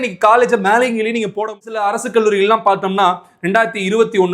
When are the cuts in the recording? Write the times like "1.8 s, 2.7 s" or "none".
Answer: 1.7 s